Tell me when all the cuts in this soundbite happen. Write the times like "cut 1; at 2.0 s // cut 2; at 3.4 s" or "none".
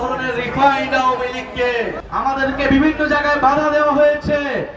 cut 1; at 2.0 s